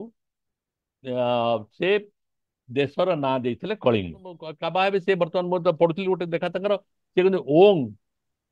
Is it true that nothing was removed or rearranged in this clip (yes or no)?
no